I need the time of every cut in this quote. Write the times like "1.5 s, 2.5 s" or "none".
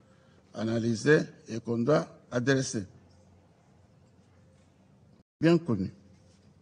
5.4 s

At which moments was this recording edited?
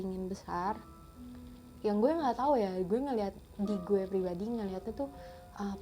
none

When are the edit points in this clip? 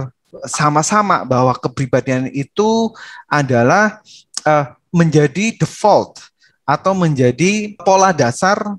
7.8 s

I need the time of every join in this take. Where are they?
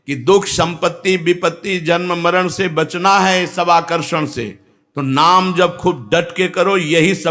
none

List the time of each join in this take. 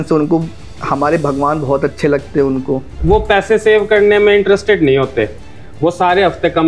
3.0 s

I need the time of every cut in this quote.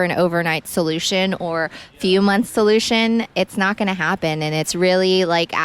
4.7 s

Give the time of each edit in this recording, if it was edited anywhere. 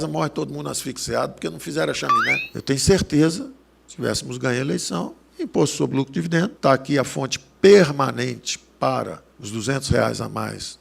2.5 s

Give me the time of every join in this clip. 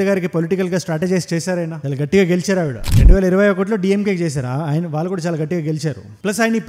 none

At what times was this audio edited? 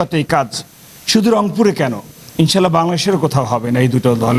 none

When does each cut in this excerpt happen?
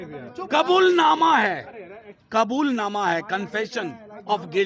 none

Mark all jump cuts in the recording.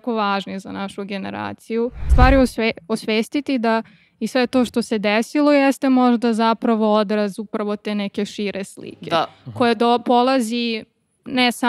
2.0 s

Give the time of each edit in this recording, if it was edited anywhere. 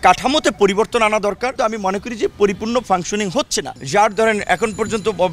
1.5 s, 3.7 s

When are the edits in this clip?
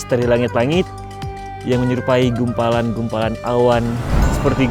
none

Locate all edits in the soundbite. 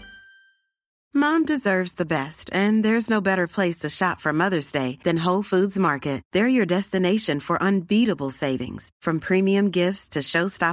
1.0 s

